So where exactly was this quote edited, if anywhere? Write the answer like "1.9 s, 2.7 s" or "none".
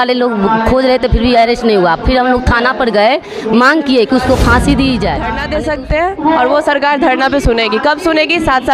5.4 s